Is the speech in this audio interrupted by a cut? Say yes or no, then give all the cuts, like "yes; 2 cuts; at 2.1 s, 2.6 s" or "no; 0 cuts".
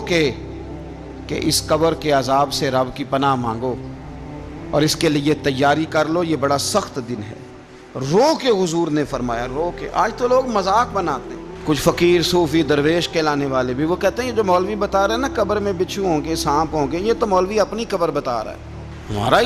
no; 0 cuts